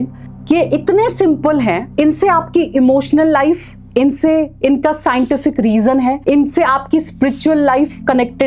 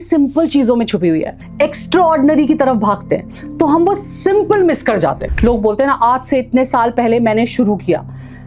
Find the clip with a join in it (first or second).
second